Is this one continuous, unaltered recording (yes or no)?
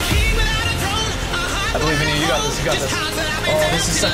yes